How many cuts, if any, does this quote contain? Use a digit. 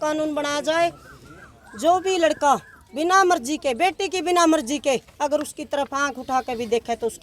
0